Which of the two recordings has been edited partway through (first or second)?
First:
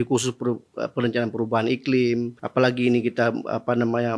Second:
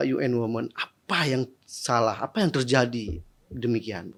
first